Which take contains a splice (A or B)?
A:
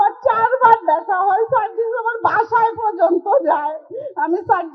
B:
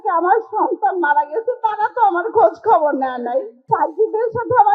B